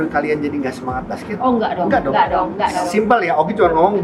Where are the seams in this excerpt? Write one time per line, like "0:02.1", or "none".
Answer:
none